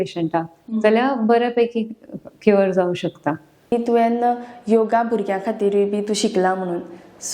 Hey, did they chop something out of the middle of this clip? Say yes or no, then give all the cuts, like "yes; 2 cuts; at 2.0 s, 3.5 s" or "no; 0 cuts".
yes; 1 cut; at 3.7 s